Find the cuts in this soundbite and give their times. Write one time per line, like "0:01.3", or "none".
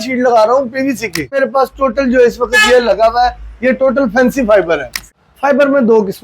0:01.4
0:05.0